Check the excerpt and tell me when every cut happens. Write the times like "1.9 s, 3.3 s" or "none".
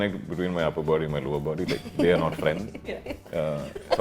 none

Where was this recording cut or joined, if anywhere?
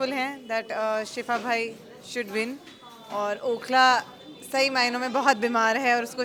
none

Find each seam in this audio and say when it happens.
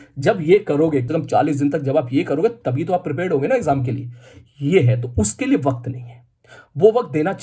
1.1 s

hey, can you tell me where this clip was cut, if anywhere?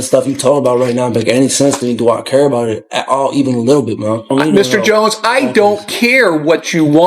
4.3 s

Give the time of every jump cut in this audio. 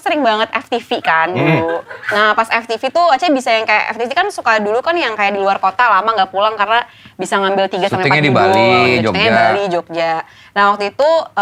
none

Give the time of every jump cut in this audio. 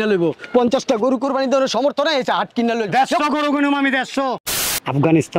4.4 s

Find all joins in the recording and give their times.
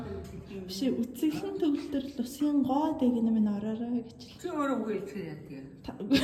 none

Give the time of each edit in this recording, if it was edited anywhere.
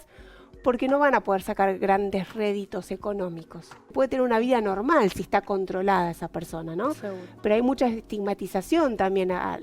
3.9 s

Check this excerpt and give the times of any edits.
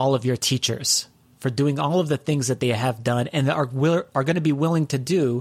none

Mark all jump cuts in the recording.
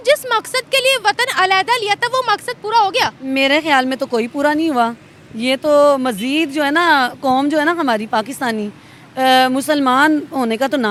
none

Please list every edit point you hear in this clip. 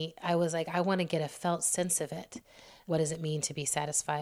2.7 s

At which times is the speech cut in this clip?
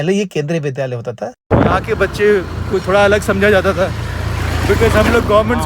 1.4 s

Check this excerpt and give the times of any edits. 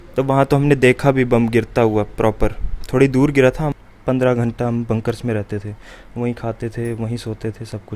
3.7 s

